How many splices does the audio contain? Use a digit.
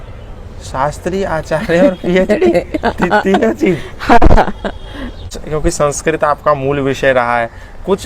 1